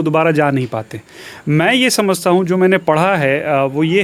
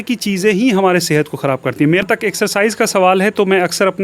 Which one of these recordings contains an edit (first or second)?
second